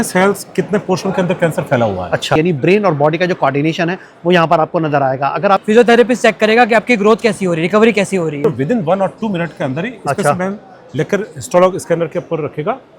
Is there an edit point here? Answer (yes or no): yes